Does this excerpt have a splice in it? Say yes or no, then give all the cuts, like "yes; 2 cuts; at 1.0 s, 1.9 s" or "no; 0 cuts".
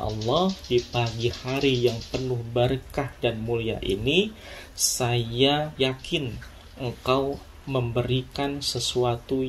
yes; 1 cut; at 5.7 s